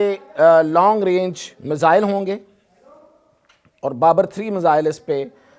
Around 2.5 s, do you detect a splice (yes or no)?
no